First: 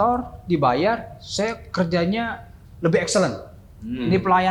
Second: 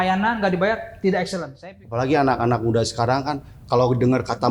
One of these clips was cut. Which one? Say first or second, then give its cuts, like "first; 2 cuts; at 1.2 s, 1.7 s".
second; 1 cut; at 1.5 s